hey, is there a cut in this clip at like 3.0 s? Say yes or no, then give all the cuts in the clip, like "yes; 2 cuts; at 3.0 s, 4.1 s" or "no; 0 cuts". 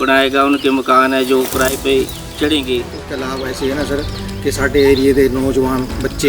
yes; 1 cut; at 3.0 s